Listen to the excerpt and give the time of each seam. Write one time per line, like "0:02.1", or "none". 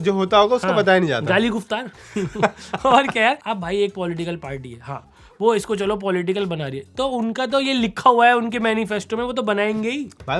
0:03.4